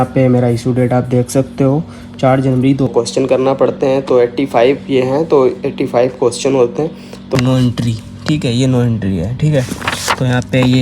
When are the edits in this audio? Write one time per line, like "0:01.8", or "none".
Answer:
0:02.9
0:07.3

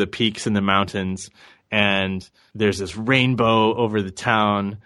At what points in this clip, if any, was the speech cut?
0:02.4

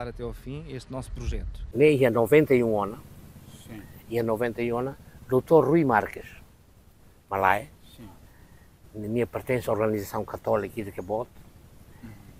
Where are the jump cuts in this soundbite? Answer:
0:01.5

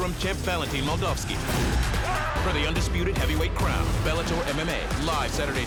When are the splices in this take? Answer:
none

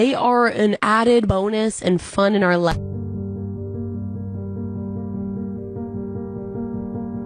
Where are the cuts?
none

